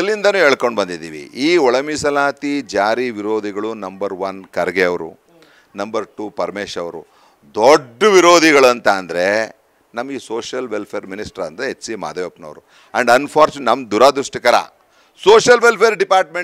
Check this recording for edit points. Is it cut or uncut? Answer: uncut